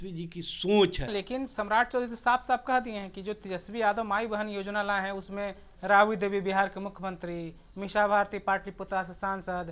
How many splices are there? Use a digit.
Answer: 1